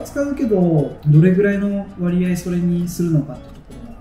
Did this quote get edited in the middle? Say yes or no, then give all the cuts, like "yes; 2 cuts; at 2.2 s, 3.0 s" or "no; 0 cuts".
no; 0 cuts